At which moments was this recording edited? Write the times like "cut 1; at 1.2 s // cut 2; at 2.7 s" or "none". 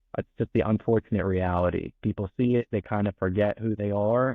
none